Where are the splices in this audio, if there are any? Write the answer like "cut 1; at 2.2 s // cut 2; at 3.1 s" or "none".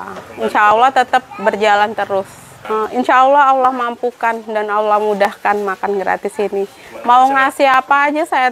cut 1; at 6.9 s